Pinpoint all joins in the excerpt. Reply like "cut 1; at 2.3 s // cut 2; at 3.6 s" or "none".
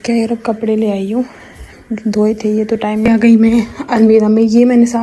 cut 1; at 3.0 s